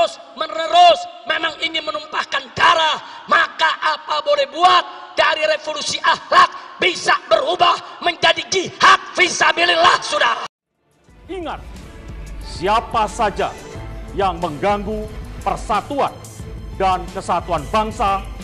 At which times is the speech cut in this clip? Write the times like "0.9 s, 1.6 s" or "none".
10.5 s